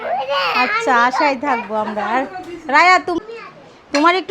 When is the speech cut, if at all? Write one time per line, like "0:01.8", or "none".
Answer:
0:03.2